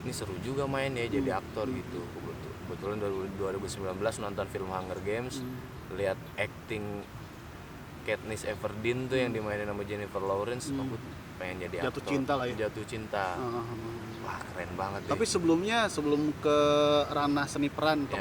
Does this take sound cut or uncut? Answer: uncut